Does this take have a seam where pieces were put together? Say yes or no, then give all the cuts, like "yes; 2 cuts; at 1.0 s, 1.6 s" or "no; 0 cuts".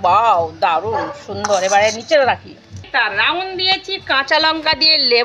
yes; 1 cut; at 2.9 s